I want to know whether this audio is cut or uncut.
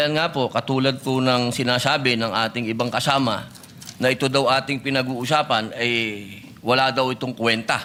uncut